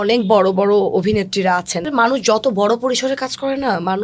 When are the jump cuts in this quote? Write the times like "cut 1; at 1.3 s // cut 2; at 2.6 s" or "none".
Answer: cut 1; at 1.8 s